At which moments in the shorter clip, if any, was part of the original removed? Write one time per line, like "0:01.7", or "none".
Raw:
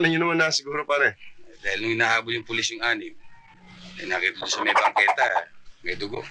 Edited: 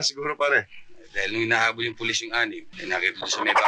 0:02.7